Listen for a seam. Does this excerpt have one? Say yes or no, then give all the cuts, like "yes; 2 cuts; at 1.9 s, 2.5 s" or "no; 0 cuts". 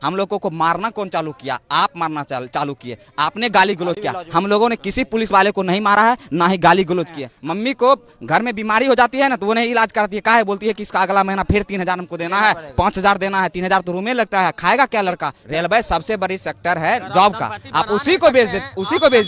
yes; 2 cuts; at 7.3 s, 15.4 s